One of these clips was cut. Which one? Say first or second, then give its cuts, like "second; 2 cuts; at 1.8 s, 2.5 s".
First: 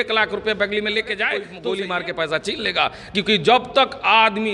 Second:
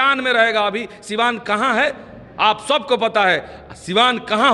first; 1 cut; at 1.5 s